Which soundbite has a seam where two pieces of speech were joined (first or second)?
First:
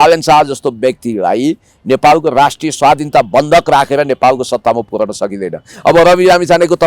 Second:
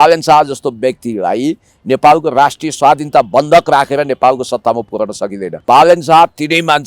second